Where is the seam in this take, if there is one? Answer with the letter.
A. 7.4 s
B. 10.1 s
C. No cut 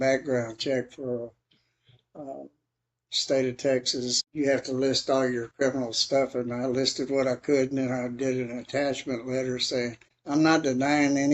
B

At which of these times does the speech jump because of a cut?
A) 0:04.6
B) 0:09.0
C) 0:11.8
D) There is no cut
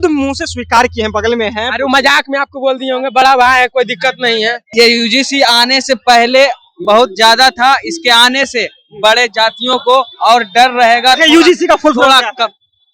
A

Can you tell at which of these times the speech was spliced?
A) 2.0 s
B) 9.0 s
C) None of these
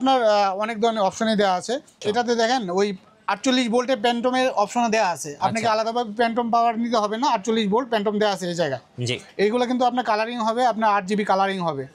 A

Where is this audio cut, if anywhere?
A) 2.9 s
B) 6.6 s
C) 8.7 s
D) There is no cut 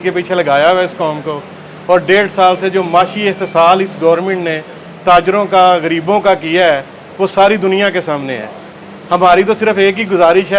D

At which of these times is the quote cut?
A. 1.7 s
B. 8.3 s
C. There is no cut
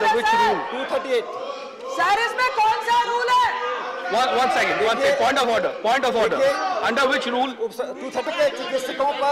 B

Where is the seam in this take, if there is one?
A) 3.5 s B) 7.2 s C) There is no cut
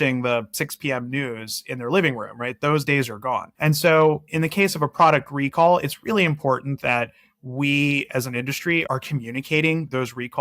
A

